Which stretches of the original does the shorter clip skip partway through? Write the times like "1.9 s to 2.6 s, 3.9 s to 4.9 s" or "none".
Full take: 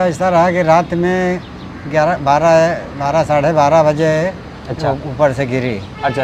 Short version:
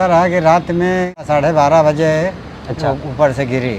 1.5 s to 3.3 s